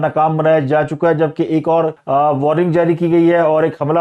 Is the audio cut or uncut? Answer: cut